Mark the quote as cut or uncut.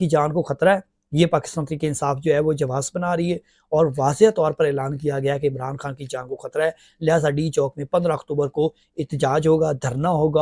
uncut